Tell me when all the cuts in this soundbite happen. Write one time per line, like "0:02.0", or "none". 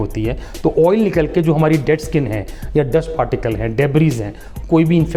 none